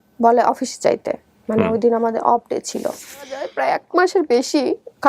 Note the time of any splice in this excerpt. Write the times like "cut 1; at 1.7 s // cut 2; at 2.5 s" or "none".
cut 1; at 3.5 s